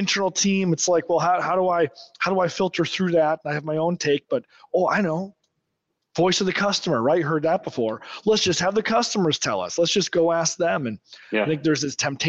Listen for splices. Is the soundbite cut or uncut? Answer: uncut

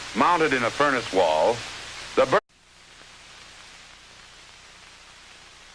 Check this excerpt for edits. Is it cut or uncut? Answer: uncut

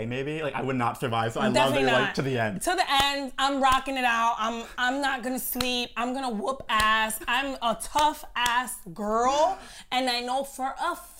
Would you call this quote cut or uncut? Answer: uncut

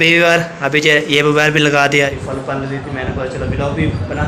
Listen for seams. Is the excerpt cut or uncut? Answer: cut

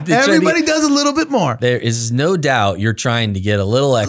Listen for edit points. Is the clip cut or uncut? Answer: uncut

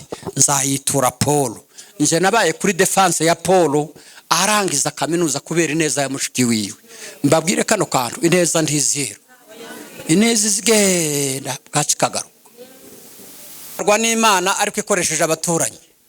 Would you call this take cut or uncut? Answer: cut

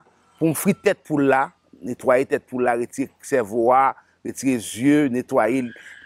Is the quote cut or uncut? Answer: uncut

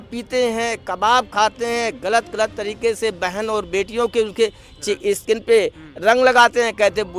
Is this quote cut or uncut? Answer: uncut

